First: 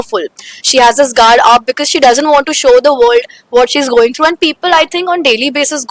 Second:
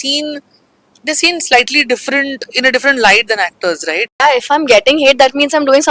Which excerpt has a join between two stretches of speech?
second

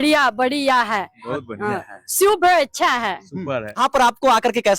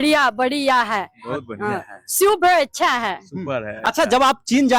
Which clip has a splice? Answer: first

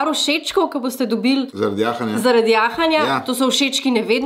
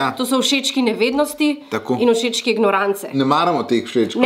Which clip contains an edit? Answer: second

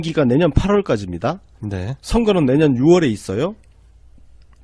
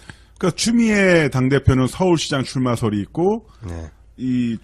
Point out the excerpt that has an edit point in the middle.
first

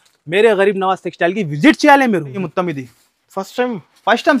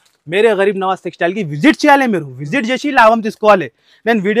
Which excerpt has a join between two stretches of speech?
first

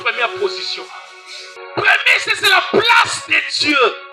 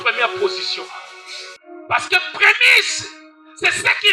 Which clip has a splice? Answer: first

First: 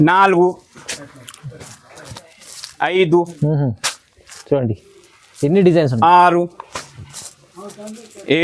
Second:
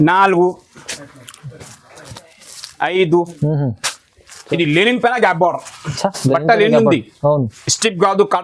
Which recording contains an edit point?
second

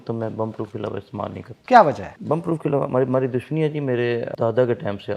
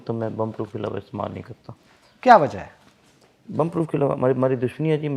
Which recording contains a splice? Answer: first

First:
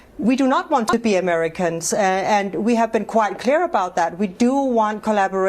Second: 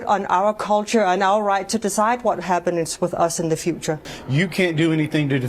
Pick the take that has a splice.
second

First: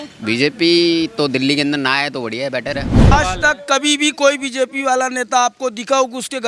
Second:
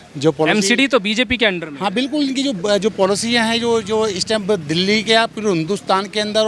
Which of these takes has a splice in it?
first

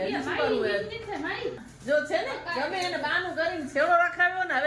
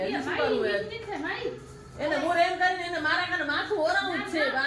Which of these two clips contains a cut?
first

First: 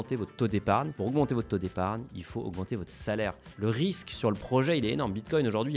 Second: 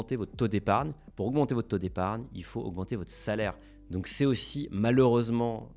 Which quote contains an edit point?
first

